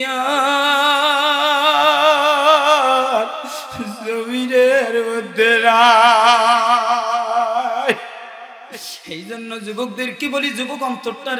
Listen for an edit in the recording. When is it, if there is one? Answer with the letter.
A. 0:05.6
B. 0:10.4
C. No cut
C